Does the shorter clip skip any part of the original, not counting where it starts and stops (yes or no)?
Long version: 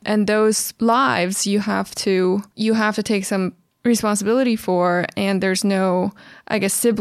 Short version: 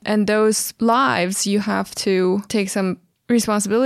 yes